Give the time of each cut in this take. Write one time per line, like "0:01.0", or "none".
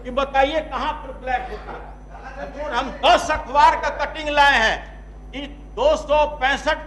none